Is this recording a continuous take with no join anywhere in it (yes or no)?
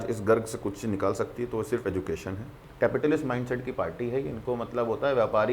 no